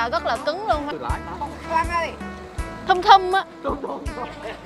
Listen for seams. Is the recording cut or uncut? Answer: cut